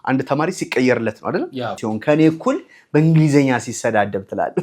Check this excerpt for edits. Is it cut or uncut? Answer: cut